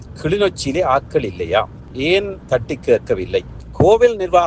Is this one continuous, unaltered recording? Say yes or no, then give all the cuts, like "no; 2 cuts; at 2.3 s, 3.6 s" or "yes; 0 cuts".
no; 1 cut; at 3.5 s